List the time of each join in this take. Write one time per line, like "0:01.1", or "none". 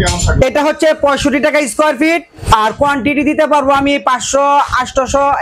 none